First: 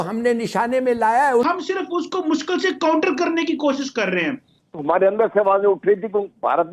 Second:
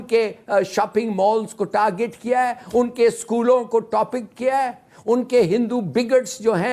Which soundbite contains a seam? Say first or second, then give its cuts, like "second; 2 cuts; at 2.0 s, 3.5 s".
first; 2 cuts; at 1.4 s, 4.5 s